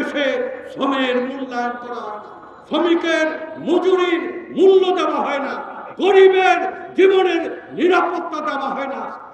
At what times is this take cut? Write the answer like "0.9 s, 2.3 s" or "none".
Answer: none

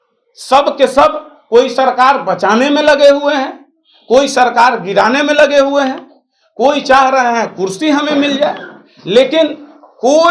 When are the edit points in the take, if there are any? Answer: none

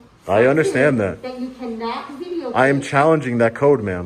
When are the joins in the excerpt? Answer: none

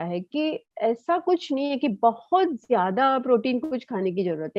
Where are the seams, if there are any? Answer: none

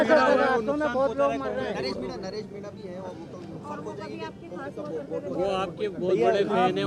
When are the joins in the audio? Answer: none

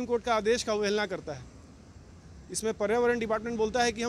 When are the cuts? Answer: none

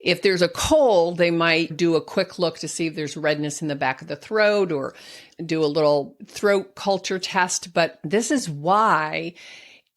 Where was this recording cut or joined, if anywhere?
6.2 s, 8.0 s

